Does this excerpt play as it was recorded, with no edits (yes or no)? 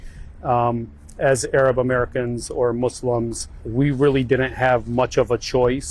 yes